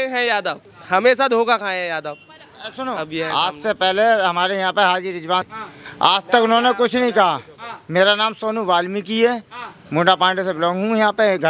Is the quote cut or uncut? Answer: cut